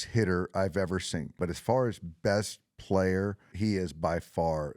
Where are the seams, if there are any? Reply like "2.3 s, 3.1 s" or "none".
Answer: 1.4 s, 3.5 s

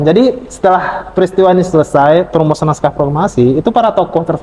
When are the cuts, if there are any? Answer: none

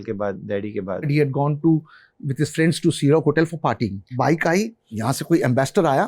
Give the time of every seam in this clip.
1.1 s, 4.0 s, 4.9 s

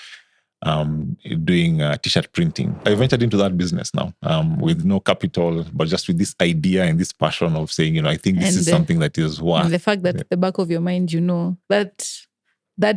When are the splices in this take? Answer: 2.8 s

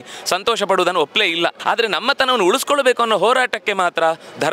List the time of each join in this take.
1.6 s

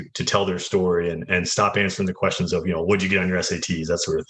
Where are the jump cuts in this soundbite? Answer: 1.2 s

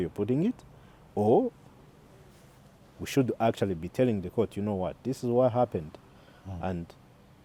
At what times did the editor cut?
none

